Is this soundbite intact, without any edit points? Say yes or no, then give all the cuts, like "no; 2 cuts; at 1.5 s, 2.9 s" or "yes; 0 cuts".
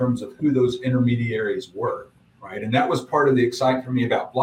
yes; 0 cuts